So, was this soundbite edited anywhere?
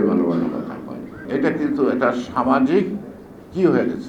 yes; 1 cut; at 1.2 s

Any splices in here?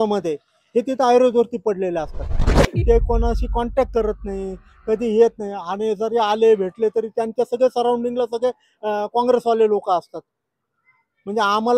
yes; 1 cut; at 2.6 s

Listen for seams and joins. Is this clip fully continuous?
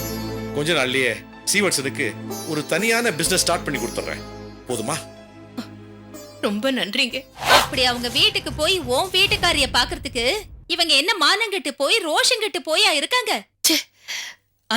no; 2 cuts; at 7.3 s, 13.5 s

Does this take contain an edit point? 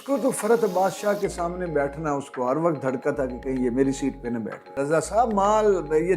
yes; 1 cut; at 4.7 s

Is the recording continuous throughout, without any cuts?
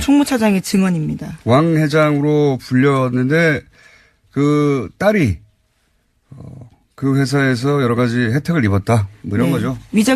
no; 1 cut; at 3.4 s

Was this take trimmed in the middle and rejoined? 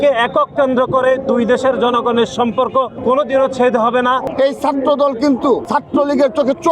yes; 3 cuts; at 2.9 s, 4.3 s, 5.6 s

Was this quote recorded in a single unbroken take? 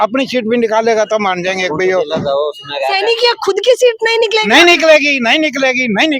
yes; 0 cuts

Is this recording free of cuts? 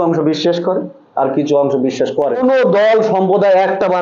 no; 1 cut; at 2.4 s

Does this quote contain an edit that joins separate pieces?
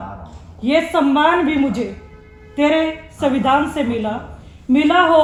no; 0 cuts

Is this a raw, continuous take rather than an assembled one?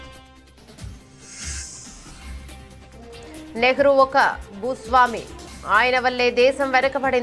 yes; 0 cuts

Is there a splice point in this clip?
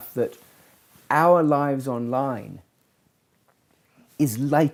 no; 0 cuts

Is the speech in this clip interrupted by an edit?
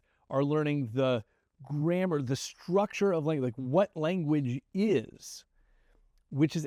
no; 0 cuts

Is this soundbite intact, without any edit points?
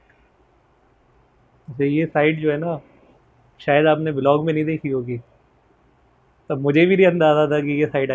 no; 1 cut; at 1.1 s

